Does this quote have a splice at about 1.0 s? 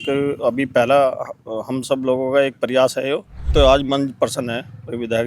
no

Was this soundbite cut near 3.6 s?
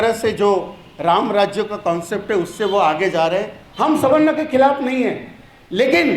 yes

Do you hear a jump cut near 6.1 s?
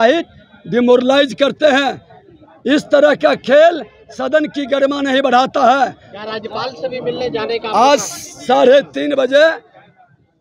yes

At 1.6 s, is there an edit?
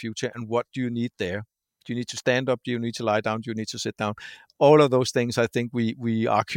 no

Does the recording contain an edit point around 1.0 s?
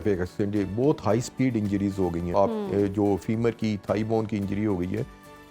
no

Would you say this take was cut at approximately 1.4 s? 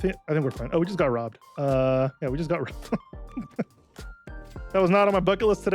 yes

